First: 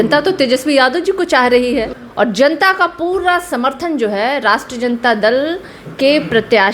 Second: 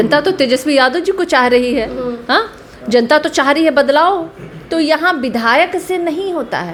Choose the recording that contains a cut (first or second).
first